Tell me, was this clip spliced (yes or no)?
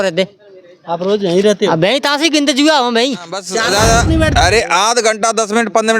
yes